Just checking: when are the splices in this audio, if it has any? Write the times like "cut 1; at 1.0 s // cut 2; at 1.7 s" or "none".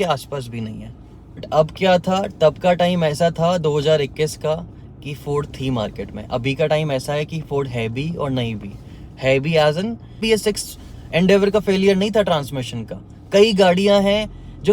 cut 1; at 1.5 s // cut 2; at 10.2 s